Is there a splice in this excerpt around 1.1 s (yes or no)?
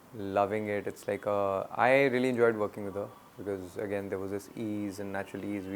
no